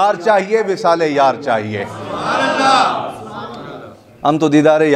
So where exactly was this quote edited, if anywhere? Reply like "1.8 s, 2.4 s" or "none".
none